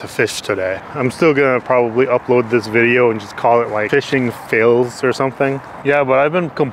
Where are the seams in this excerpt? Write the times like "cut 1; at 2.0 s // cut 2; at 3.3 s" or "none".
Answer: cut 1; at 0.9 s // cut 2; at 3.8 s // cut 3; at 5.7 s

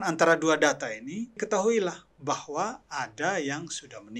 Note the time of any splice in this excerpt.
cut 1; at 1.4 s

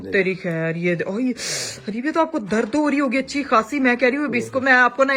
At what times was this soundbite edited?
none

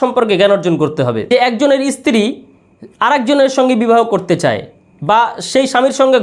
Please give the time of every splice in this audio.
cut 1; at 1.3 s

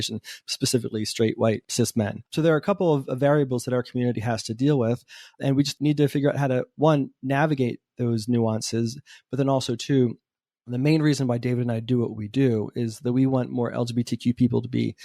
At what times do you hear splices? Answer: cut 1; at 1.9 s // cut 2; at 5.7 s

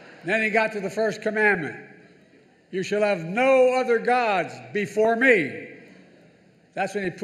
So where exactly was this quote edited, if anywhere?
none

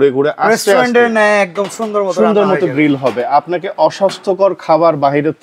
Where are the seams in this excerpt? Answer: none

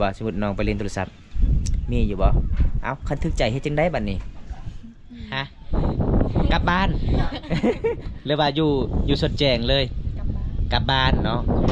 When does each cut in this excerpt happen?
none

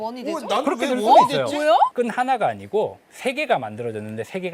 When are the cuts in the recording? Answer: cut 1; at 1.9 s

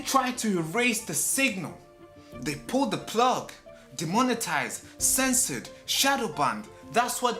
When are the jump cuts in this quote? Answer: none

